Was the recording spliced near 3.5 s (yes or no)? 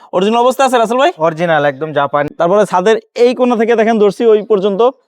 no